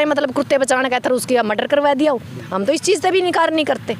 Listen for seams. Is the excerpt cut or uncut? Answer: uncut